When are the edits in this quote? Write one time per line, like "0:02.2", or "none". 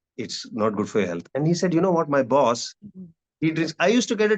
none

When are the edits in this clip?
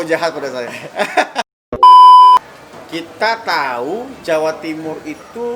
0:01.5
0:02.4

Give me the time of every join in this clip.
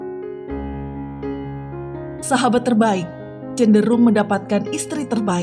0:02.3

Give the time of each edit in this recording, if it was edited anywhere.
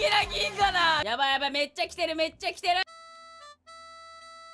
0:01.0
0:03.0

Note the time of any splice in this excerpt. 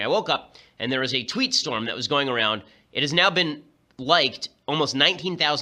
none

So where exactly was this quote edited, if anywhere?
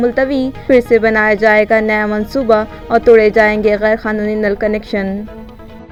none

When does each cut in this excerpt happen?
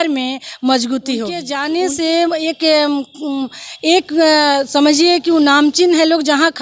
0:01.5

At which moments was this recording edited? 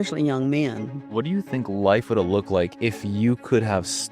0:01.1

